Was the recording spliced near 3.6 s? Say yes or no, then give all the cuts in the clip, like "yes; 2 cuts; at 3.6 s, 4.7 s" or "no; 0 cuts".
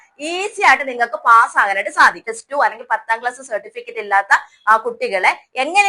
no; 1 cut; at 2.3 s